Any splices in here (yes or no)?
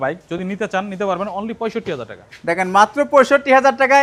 no